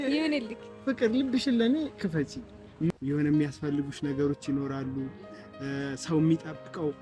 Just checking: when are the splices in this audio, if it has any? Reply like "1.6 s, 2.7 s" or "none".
2.9 s